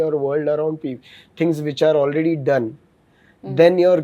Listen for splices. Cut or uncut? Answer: uncut